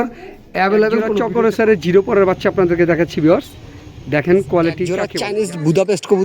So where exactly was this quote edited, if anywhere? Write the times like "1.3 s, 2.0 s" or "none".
0.9 s, 4.8 s